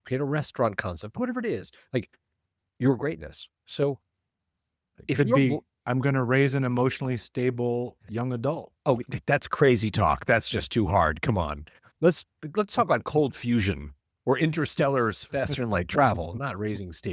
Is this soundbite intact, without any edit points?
yes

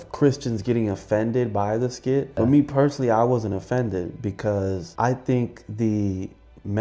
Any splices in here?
yes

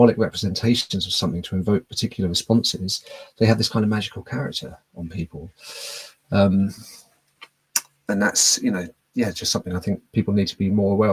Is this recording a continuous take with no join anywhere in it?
yes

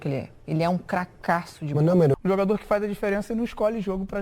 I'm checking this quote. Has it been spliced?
yes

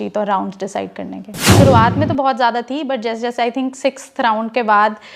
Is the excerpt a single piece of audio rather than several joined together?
no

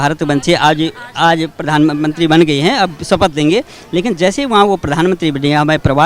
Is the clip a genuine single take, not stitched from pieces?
yes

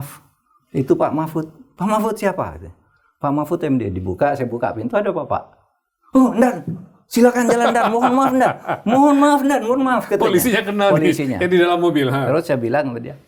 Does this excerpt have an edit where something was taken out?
no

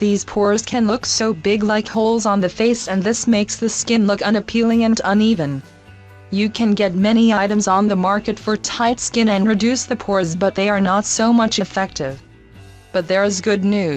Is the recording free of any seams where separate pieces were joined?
no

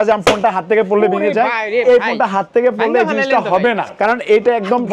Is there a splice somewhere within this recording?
yes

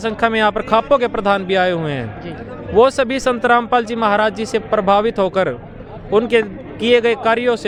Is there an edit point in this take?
no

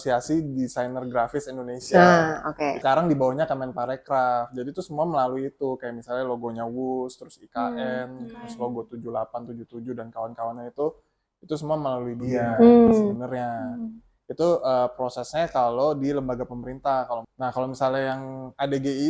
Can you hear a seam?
yes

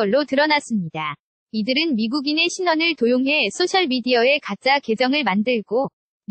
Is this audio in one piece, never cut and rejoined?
yes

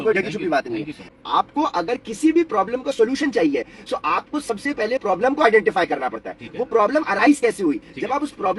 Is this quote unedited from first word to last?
no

